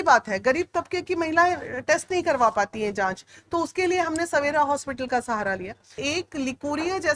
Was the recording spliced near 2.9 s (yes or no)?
no